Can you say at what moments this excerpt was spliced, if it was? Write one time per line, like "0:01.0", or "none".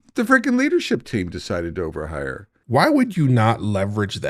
0:02.5